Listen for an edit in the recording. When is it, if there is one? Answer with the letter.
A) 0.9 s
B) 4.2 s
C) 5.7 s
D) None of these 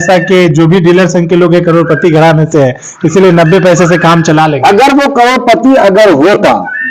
D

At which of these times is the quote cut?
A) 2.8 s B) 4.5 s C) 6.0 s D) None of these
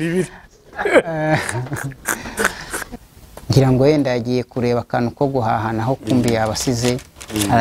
A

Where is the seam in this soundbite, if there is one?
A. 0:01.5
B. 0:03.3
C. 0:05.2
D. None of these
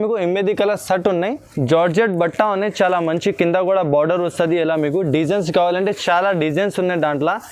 A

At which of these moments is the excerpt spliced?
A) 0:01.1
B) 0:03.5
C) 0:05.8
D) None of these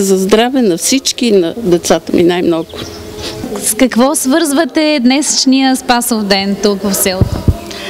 B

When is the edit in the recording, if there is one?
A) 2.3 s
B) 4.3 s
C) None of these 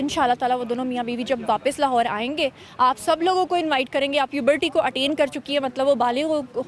B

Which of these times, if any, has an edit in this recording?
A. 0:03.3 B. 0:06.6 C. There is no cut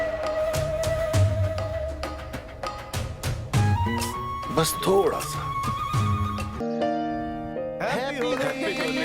B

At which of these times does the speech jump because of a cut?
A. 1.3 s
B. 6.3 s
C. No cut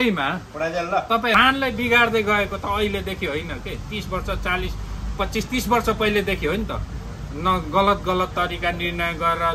A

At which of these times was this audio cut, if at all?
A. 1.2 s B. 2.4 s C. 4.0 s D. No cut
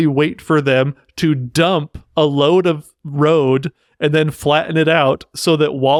D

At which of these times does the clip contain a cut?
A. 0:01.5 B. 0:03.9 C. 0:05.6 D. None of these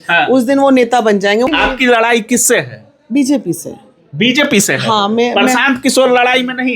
A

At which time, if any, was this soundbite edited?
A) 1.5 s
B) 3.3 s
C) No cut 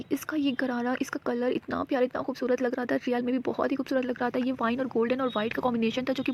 C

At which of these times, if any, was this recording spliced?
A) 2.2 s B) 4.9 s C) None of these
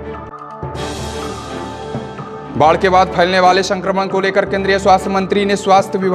A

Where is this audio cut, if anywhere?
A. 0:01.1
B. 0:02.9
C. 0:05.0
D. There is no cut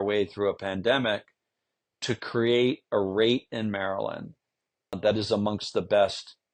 C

